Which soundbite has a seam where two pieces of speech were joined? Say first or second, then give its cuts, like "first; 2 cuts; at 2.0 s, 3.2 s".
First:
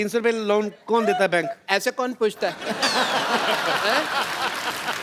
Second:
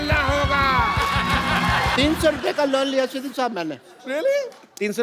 second; 1 cut; at 1.9 s